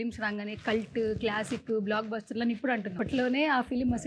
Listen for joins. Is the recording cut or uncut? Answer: cut